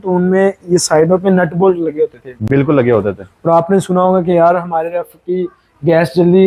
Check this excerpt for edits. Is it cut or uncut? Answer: uncut